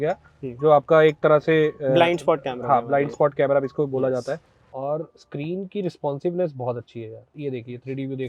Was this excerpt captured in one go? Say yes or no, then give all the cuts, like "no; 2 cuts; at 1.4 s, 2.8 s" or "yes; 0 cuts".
no; 2 cuts; at 4.5 s, 7.3 s